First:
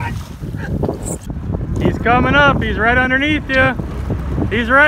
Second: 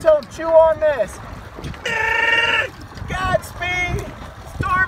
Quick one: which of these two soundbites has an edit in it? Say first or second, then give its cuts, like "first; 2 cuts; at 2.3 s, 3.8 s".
first; 1 cut; at 1.3 s